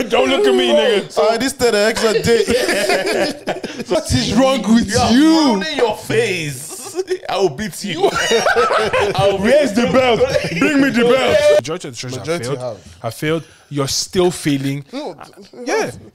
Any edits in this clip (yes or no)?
yes